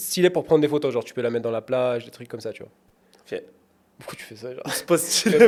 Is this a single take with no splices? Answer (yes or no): yes